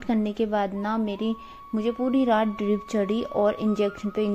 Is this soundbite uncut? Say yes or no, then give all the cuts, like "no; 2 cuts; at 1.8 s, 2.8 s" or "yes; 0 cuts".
yes; 0 cuts